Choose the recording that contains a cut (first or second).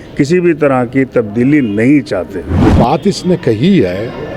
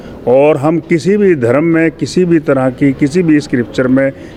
first